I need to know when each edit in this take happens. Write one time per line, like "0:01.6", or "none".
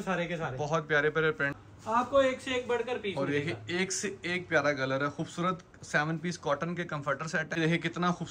0:01.5
0:07.6